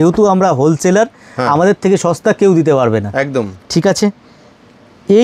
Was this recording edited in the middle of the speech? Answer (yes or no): no